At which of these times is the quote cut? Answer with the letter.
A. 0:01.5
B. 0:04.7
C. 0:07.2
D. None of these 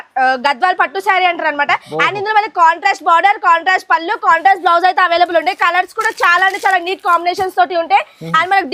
D